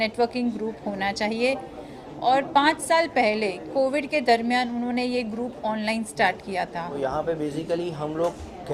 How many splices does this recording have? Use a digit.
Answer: 1